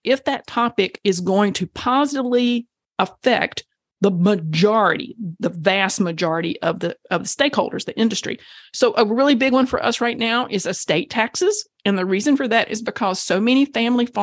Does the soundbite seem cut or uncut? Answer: uncut